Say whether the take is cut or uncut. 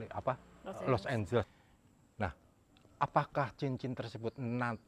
cut